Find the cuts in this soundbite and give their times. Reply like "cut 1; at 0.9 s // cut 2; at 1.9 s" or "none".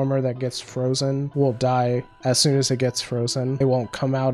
cut 1; at 1.3 s // cut 2; at 2.1 s // cut 3; at 3.5 s

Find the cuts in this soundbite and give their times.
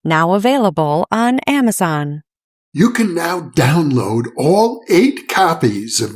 cut 1; at 2.5 s

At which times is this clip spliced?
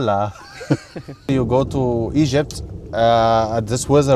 cut 1; at 1.2 s

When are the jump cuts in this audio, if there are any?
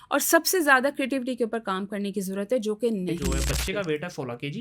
cut 1; at 3.3 s

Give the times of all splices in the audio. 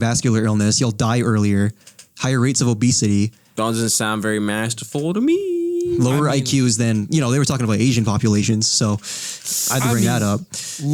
none

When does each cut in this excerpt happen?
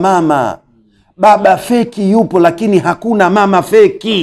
none

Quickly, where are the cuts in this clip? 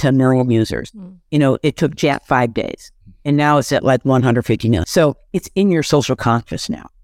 cut 1; at 4.8 s

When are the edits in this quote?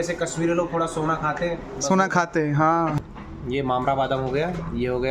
cut 1; at 3.0 s

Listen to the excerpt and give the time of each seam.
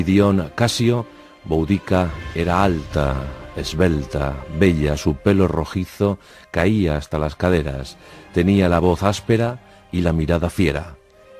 none

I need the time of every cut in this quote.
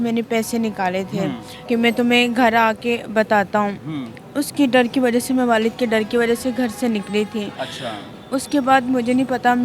cut 1; at 1.5 s

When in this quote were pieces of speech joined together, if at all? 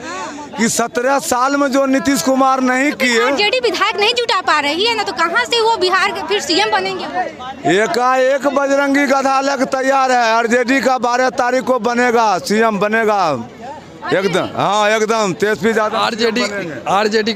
none

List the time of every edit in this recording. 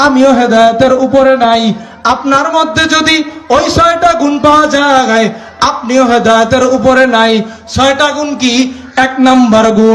none

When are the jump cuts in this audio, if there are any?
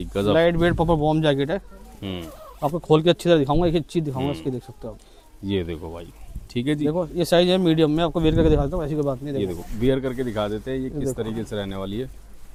none

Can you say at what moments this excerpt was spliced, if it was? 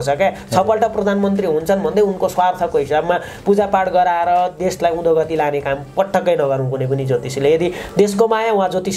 none

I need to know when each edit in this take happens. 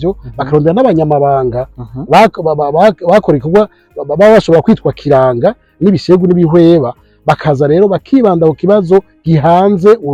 none

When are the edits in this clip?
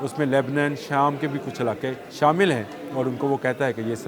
cut 1; at 2.0 s

